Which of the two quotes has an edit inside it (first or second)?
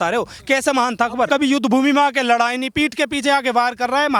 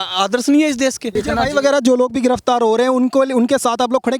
second